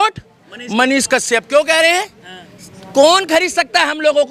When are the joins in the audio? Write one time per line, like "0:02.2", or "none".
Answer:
none

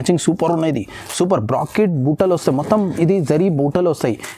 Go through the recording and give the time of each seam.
none

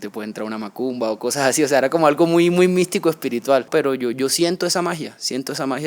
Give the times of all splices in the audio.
0:03.7

